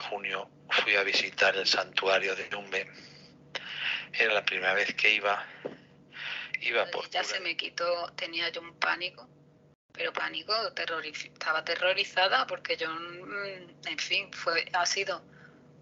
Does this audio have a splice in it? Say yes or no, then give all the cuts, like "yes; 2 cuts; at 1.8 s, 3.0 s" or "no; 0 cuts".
yes; 1 cut; at 7.1 s